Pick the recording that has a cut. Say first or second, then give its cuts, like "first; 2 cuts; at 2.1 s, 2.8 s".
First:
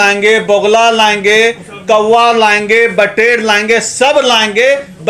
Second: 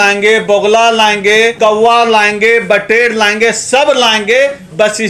second; 1 cut; at 1.5 s